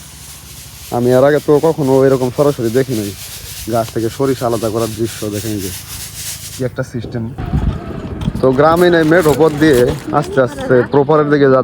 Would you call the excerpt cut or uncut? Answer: cut